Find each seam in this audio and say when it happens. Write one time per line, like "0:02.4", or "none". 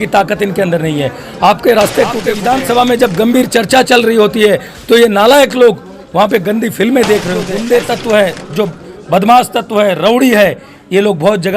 0:02.3
0:07.5